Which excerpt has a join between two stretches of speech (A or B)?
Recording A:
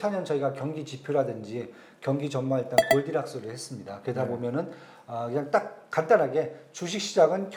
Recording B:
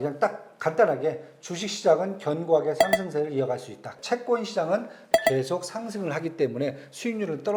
B